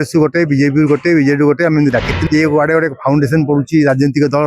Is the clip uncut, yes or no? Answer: no